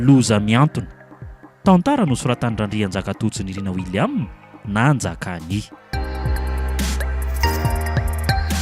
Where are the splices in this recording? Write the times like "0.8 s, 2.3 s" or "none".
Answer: 5.8 s